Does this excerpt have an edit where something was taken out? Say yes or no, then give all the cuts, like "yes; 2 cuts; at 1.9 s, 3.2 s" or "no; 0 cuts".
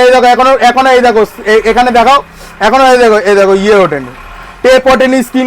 no; 0 cuts